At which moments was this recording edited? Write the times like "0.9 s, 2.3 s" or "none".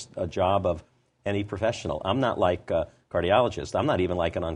none